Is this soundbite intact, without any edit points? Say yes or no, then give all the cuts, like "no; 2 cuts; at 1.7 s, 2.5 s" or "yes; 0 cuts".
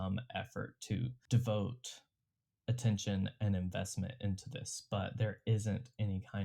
yes; 0 cuts